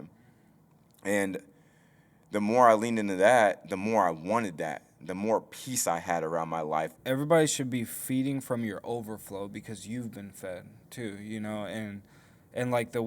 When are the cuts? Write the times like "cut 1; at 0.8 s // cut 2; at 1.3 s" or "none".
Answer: cut 1; at 6.9 s